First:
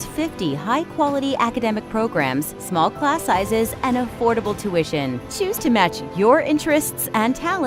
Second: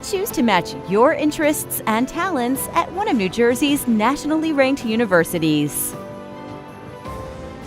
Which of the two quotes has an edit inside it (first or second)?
second